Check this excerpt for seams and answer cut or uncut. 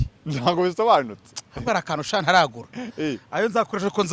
uncut